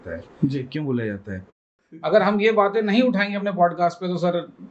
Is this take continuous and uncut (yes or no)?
no